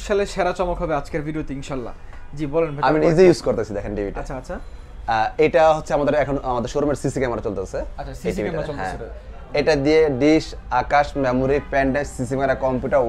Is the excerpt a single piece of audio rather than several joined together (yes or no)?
yes